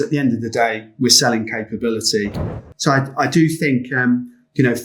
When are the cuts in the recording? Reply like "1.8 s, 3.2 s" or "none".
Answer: 2.5 s